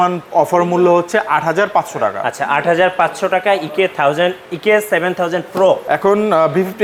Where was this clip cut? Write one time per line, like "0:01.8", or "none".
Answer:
none